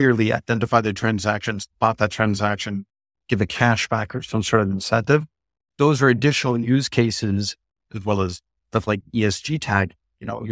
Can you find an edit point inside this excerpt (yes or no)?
no